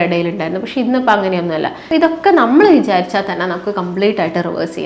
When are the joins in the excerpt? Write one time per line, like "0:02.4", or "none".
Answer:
0:01.8